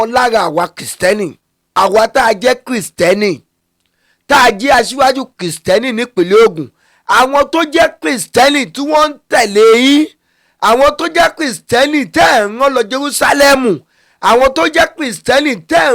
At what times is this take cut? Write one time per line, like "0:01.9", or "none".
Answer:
0:01.8